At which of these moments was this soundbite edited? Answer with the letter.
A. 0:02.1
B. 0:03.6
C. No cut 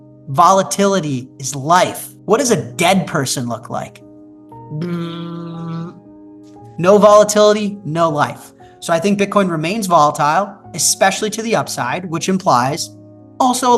A